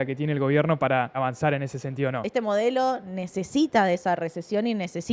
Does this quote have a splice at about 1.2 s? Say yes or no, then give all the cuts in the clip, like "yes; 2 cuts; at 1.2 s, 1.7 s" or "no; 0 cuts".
yes; 2 cuts; at 1.2 s, 2.2 s